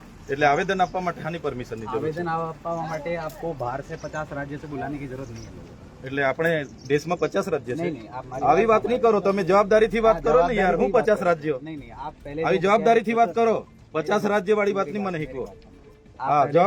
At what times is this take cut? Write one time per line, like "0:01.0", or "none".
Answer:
none